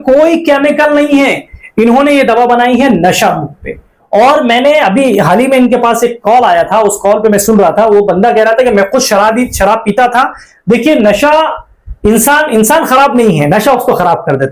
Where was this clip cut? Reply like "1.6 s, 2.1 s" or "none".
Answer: none